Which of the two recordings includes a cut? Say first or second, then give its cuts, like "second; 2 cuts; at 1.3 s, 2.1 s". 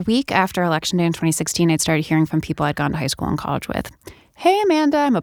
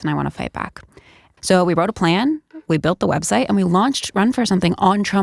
second; 1 cut; at 1.2 s